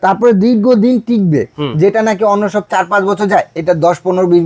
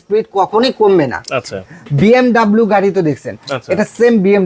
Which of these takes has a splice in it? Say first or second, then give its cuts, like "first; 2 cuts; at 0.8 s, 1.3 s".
second; 1 cut; at 1.6 s